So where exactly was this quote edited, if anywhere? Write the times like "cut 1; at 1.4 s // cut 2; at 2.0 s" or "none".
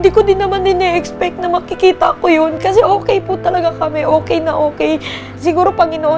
cut 1; at 2.6 s // cut 2; at 5.3 s